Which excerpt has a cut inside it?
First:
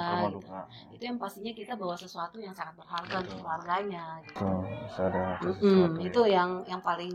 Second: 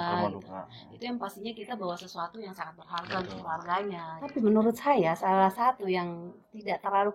second; 1 cut; at 4.4 s

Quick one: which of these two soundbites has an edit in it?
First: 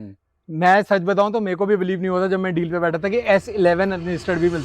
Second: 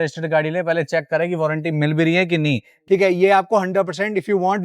second; 1 cut; at 2.7 s

